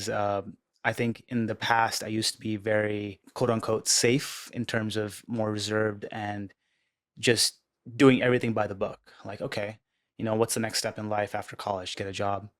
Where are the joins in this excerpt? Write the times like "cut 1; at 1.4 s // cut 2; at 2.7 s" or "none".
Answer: cut 1; at 3.2 s